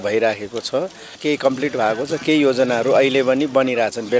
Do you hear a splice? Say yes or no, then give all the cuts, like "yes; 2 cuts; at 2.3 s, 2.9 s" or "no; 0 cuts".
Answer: yes; 1 cut; at 1.2 s